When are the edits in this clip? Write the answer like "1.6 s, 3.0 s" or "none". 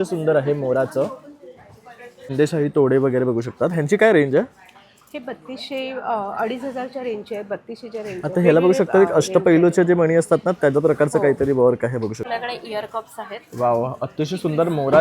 2.3 s, 12.2 s